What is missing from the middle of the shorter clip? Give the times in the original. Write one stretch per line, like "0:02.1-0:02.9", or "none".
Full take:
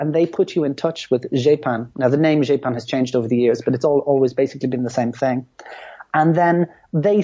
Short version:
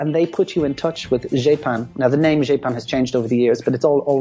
none